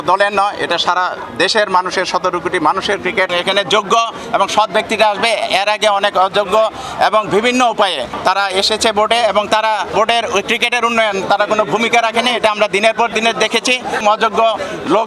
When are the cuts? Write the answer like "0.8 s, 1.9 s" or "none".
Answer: 3.3 s, 8.1 s, 9.9 s, 14.0 s